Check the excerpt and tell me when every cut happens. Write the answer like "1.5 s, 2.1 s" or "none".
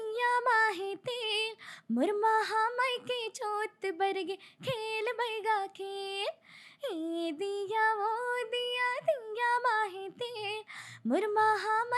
none